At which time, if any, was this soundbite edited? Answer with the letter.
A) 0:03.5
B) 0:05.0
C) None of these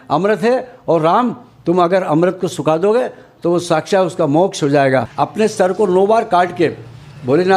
B